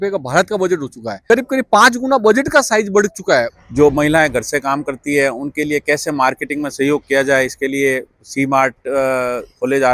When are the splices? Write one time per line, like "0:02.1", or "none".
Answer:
0:01.1
0:03.6